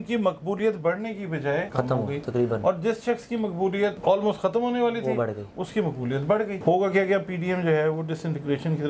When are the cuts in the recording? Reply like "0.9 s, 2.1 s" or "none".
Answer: 1.7 s, 4.0 s, 6.6 s